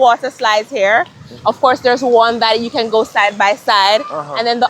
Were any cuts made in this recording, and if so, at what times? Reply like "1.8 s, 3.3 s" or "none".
none